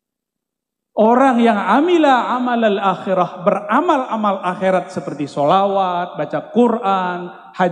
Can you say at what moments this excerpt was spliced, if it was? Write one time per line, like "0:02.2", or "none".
none